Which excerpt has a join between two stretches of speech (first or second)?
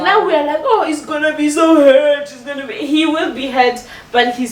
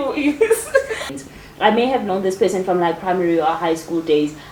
second